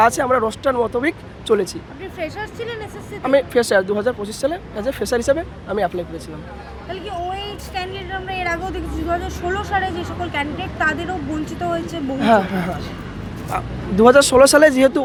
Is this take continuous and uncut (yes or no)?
yes